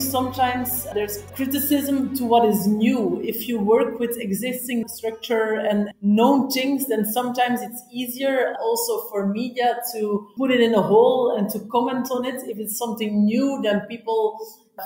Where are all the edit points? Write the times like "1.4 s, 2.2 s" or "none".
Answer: 1.3 s